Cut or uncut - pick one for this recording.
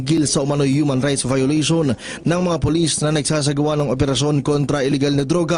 cut